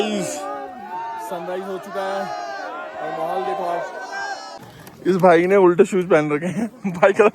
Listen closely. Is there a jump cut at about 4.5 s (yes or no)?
yes